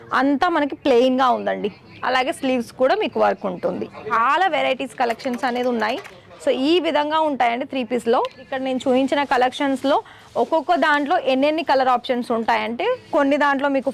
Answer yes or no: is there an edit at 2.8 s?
no